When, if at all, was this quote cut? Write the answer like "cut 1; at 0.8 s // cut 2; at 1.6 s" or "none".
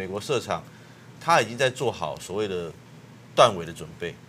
cut 1; at 1.1 s